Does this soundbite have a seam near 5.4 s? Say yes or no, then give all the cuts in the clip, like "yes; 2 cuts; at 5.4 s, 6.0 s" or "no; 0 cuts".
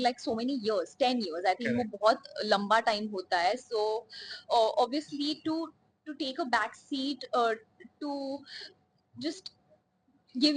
no; 0 cuts